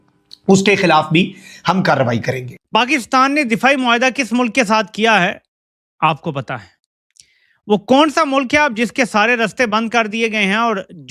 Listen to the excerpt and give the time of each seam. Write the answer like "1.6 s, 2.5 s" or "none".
2.5 s